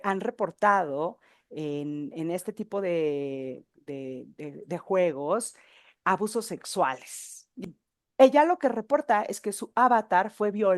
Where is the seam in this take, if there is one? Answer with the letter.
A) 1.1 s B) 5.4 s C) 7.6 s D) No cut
C